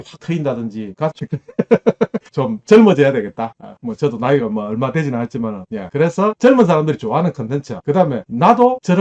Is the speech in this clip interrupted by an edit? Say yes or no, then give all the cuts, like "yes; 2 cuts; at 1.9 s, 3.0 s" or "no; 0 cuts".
yes; 1 cut; at 1.2 s